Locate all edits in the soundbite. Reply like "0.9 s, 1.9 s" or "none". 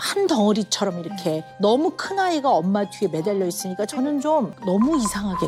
4.6 s